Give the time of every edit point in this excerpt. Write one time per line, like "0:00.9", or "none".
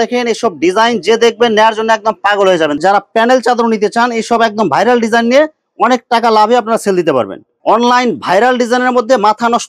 0:02.8
0:07.5